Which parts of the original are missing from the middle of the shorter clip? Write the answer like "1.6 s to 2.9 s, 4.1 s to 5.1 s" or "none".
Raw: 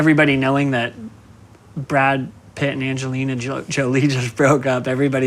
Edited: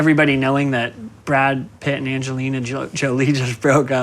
1.1 s to 1.7 s, 2.3 s to 2.5 s